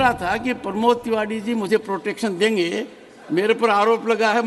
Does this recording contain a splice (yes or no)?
no